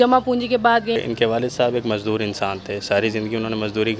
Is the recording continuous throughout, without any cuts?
no; 1 cut; at 0.9 s

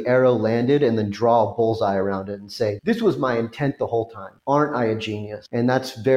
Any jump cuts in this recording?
no; 0 cuts

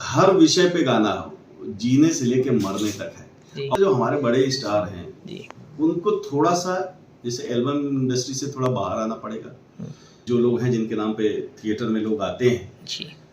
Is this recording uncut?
no; 2 cuts; at 3.7 s, 10.1 s

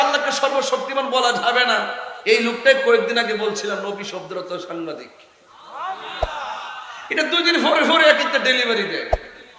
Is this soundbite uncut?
yes; 0 cuts

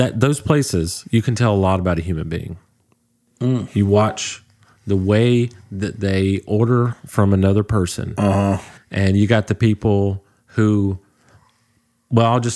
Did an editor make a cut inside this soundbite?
no; 0 cuts

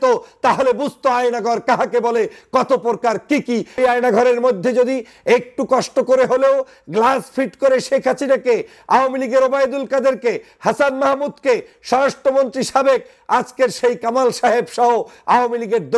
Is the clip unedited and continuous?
no; 1 cut; at 3.8 s

